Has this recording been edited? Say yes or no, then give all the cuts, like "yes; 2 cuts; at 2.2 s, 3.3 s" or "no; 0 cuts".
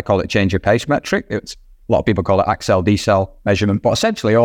no; 0 cuts